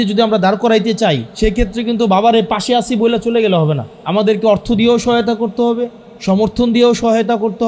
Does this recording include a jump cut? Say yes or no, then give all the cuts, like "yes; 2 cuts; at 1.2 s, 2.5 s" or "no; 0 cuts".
yes; 2 cuts; at 1.3 s, 3.9 s